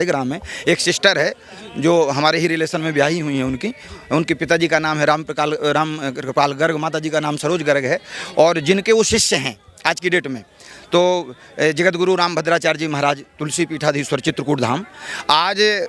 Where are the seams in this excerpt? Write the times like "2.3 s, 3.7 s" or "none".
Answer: none